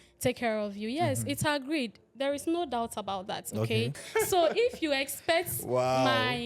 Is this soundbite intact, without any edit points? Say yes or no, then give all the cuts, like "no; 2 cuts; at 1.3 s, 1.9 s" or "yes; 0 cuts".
no; 1 cut; at 4.0 s